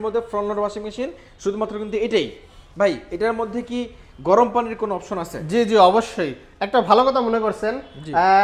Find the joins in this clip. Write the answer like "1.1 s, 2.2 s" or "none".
none